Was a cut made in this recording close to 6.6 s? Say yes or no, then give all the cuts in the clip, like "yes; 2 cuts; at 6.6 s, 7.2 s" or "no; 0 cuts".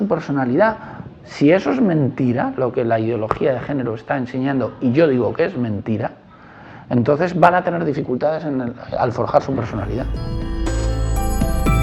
no; 1 cut; at 10.2 s